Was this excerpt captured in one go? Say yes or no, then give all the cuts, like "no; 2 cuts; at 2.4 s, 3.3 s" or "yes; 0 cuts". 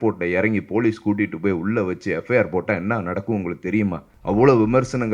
no; 1 cut; at 4.1 s